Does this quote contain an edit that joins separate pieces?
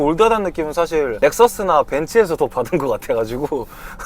yes; 1 cut; at 1.1 s

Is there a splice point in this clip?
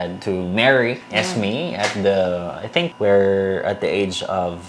no; 0 cuts

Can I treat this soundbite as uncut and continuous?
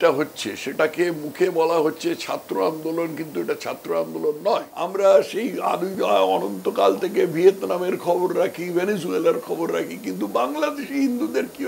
no; 1 cut; at 4.8 s

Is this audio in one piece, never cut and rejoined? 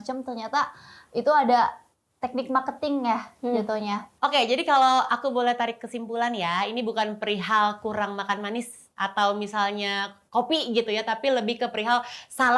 no; 1 cut; at 4.1 s

